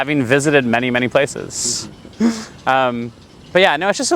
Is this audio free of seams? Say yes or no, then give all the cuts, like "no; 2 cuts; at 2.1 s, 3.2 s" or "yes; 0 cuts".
yes; 0 cuts